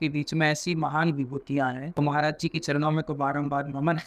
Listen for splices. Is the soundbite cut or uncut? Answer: cut